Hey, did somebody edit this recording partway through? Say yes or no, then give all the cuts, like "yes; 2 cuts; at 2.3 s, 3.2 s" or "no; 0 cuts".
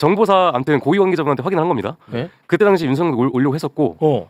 no; 0 cuts